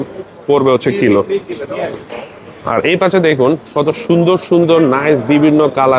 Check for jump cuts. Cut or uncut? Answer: uncut